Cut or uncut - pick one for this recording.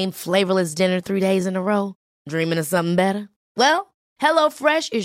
uncut